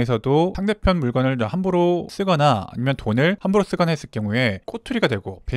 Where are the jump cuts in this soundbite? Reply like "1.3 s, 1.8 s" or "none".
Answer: none